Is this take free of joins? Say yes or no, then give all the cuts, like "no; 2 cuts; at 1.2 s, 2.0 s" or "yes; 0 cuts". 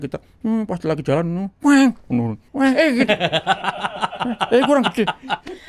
yes; 0 cuts